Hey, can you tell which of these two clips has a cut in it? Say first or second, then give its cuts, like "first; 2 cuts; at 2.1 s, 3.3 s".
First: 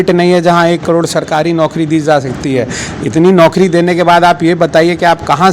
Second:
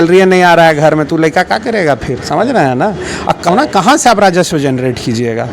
second; 1 cut; at 3.5 s